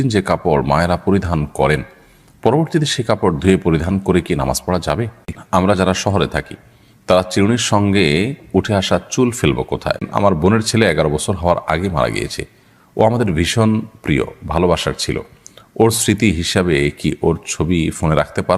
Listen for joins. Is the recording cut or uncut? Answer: cut